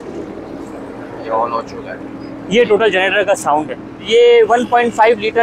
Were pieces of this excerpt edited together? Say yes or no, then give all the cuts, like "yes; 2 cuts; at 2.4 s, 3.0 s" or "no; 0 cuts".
yes; 1 cut; at 4.0 s